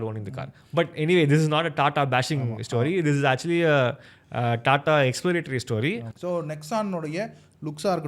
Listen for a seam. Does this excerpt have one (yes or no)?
yes